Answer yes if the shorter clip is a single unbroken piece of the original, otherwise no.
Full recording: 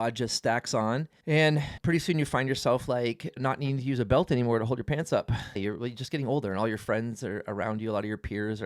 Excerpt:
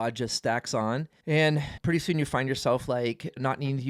yes